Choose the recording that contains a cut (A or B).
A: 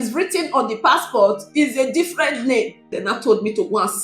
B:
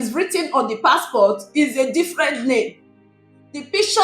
A